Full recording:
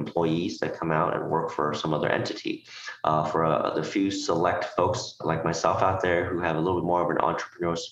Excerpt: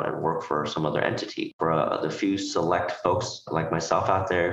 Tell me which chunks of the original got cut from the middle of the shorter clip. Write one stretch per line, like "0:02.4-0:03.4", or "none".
0:02.6-0:03.3